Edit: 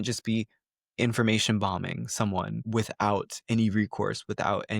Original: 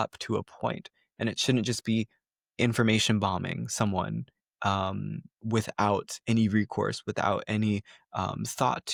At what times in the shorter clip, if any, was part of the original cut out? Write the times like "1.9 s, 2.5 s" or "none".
2.6 s